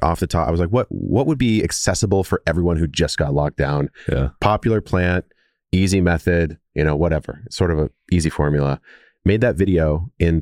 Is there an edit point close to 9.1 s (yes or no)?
no